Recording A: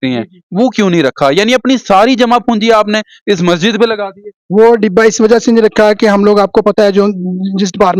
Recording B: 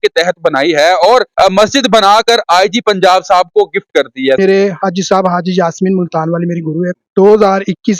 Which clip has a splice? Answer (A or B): B